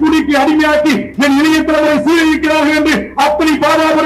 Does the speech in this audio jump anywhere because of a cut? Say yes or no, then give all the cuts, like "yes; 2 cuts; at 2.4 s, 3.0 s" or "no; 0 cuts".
no; 0 cuts